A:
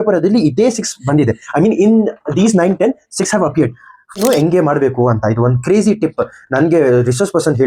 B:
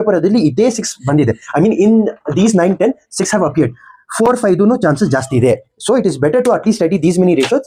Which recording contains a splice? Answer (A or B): A